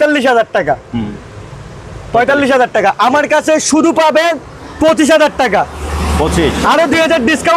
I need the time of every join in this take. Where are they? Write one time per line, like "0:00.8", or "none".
none